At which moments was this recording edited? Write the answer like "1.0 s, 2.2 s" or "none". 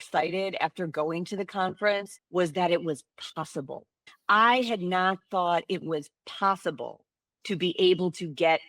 2.2 s